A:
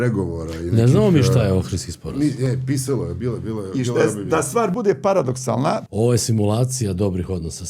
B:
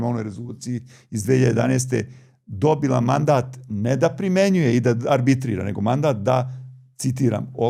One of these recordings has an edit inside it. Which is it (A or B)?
A